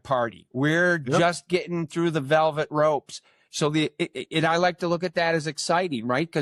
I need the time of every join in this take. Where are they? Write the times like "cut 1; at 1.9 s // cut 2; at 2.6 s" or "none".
none